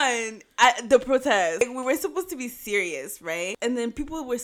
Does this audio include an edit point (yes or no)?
yes